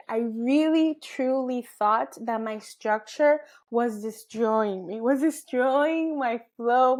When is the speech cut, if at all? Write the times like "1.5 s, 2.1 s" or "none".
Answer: none

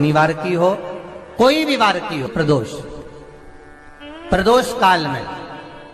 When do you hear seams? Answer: 2.3 s

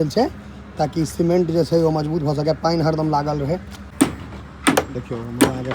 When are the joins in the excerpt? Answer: 3.8 s

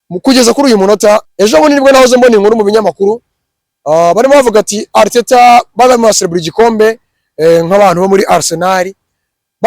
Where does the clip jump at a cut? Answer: 1.3 s

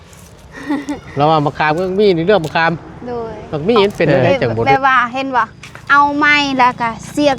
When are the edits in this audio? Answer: 4.7 s

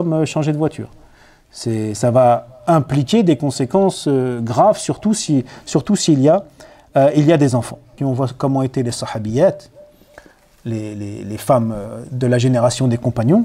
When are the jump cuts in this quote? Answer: 8.0 s

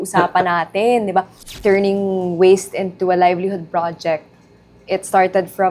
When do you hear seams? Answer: 1.4 s

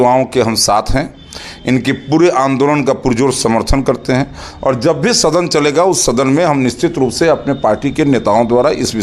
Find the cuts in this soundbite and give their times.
none

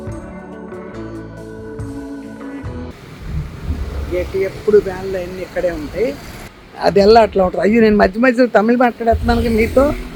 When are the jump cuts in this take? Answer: none

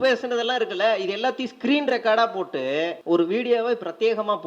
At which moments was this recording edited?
3.0 s

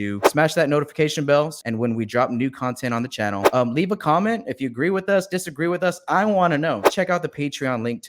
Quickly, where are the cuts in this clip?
1.6 s

